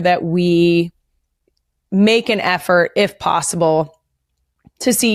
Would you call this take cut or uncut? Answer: uncut